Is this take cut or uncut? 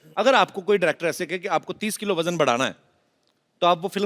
uncut